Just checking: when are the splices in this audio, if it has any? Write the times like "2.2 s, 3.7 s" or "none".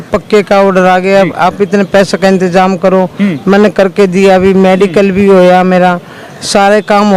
none